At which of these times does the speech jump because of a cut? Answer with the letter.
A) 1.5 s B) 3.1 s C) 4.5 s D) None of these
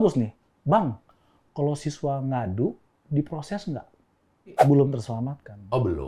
C